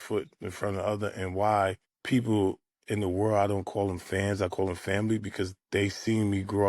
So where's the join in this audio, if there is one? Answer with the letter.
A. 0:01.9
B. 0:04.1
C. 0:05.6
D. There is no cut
A